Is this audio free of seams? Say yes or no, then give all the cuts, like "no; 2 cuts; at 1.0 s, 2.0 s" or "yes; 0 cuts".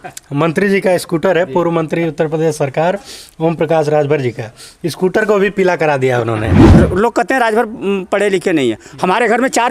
no; 1 cut; at 6.7 s